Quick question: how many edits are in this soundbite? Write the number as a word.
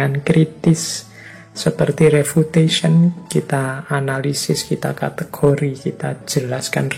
zero